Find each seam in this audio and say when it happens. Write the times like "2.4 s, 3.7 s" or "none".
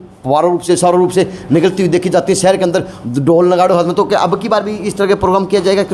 none